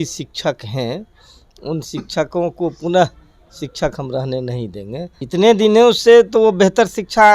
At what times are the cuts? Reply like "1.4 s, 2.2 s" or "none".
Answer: 5.2 s